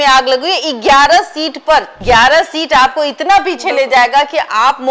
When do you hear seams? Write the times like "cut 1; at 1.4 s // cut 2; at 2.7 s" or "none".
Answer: cut 1; at 1.9 s

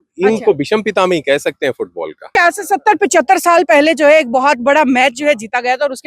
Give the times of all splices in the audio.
cut 1; at 2.4 s

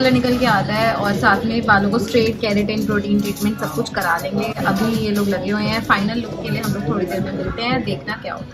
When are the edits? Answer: none

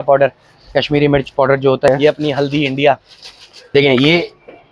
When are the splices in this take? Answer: cut 1; at 1.9 s // cut 2; at 3.5 s

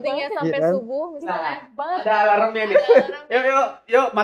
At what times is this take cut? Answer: none

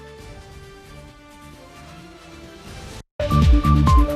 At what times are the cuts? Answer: cut 1; at 3.1 s

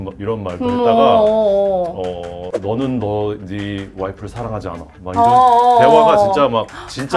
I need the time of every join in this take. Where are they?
cut 1; at 2.5 s

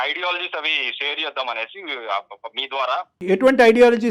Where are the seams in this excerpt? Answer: cut 1; at 3.2 s

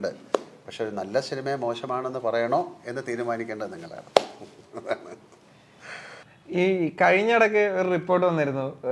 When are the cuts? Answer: none

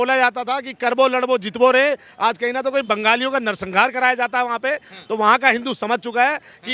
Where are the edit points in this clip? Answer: none

